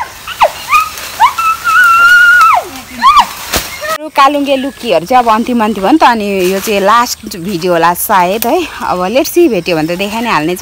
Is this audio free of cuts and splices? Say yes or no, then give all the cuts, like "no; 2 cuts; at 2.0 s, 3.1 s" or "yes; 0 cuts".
no; 1 cut; at 4.0 s